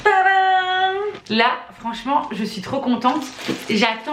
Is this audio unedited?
no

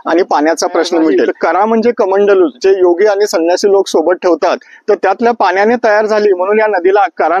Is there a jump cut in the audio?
yes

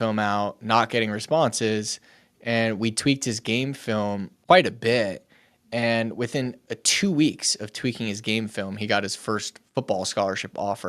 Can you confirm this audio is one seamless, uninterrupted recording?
no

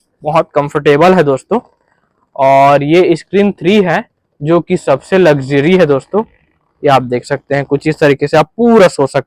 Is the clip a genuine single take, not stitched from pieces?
yes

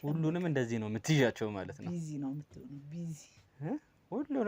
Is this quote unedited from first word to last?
yes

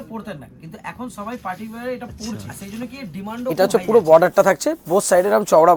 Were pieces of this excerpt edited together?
yes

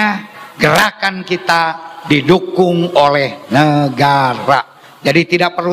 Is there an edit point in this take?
no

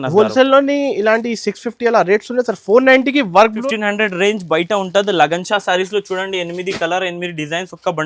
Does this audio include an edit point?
yes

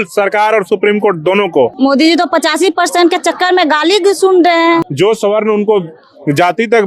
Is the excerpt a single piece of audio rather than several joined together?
no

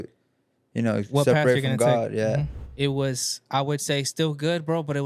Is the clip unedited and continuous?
no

